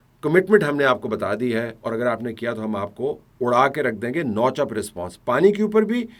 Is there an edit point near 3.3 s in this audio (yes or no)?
no